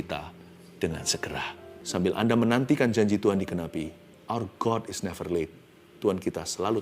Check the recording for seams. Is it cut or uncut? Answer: cut